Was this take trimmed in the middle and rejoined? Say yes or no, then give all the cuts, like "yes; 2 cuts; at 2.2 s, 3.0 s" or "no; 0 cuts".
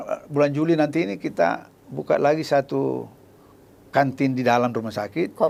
no; 0 cuts